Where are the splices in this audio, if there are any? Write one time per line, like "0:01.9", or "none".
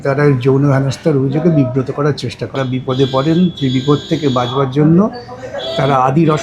0:02.6

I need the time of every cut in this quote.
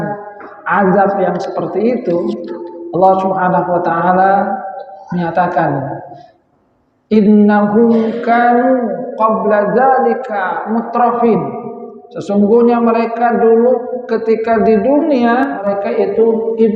0:15.6

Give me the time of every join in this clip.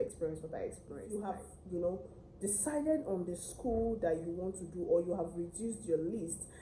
none

